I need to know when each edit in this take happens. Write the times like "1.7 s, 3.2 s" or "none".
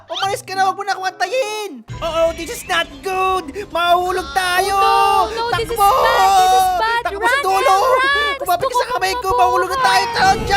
1.9 s, 8.3 s